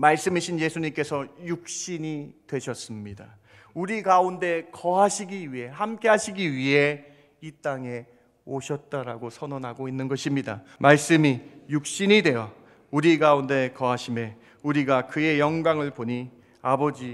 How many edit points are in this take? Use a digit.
1